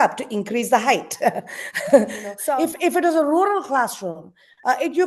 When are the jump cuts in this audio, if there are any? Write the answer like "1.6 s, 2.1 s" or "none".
2.3 s